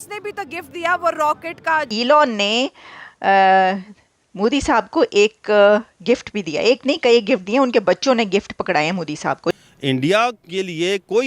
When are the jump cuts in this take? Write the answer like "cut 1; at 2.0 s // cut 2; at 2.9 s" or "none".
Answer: cut 1; at 1.9 s // cut 2; at 9.6 s